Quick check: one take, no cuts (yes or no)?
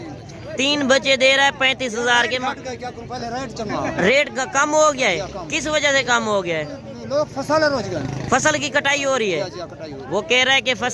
yes